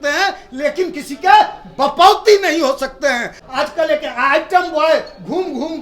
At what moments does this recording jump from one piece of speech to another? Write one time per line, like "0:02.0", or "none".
0:03.4